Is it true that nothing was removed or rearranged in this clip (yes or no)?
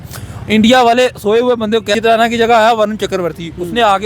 no